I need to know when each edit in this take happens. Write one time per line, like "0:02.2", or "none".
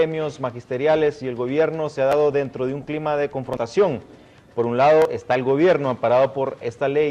0:01.9